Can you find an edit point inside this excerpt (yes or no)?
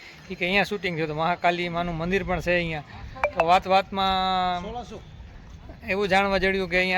no